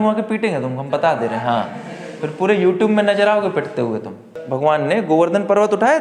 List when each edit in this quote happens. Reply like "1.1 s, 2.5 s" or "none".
4.4 s